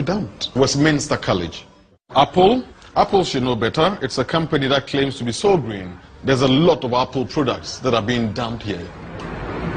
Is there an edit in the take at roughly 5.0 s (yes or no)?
yes